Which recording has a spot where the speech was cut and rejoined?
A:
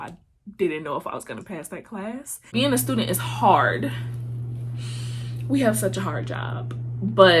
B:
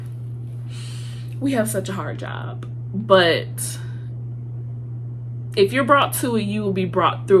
A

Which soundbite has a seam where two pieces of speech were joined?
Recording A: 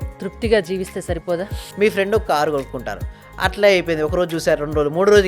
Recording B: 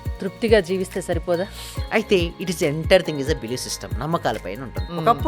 A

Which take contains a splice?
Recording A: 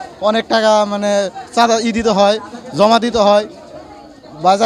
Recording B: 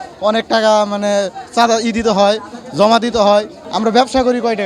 B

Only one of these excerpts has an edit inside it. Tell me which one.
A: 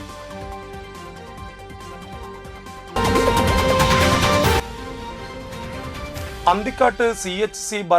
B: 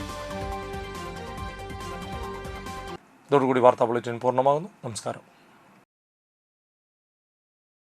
A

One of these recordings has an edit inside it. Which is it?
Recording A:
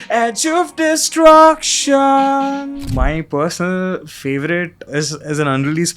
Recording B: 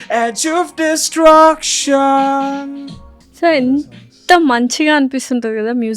A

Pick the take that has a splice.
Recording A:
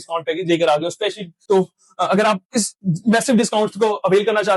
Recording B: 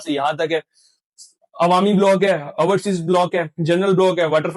A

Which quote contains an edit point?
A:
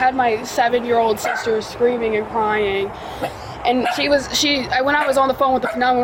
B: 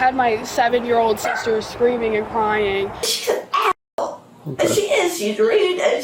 B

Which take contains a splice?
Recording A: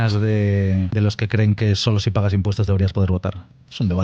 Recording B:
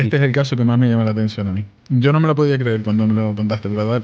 A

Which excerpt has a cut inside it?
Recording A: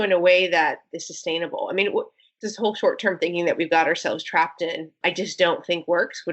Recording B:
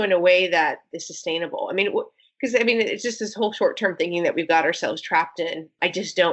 A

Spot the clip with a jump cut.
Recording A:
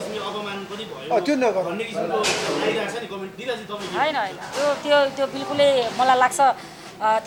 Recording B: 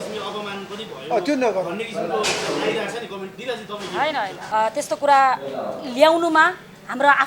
B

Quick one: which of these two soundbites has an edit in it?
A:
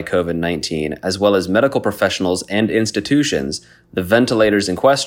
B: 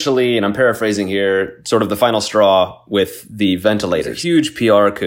B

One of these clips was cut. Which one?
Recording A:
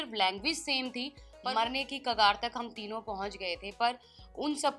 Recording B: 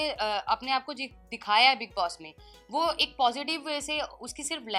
A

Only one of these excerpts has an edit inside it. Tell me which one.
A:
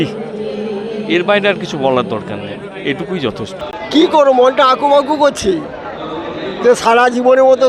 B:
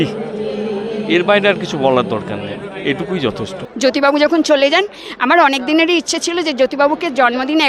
A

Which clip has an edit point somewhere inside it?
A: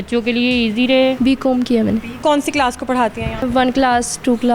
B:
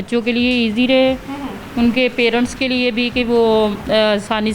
A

